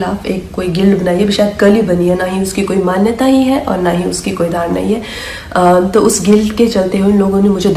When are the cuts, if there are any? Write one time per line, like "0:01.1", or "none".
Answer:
0:05.9